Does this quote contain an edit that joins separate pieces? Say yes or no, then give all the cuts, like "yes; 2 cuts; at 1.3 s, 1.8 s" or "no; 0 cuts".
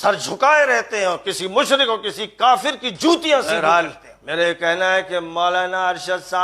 yes; 1 cut; at 3.5 s